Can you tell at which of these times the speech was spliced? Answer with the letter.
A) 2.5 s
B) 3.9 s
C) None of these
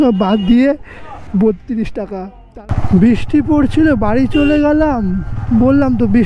A